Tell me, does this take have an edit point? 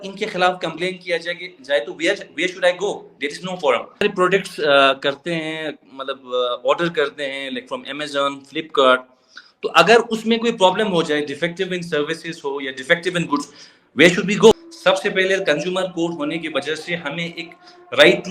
yes; 2 cuts; at 4.0 s, 14.5 s

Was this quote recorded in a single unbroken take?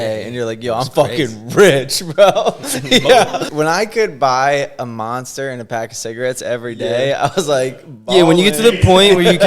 no; 1 cut; at 3.5 s

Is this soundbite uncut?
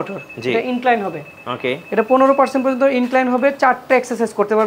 yes; 0 cuts

